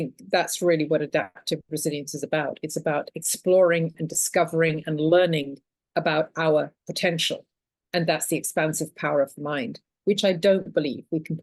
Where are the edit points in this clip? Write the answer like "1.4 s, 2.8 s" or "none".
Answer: none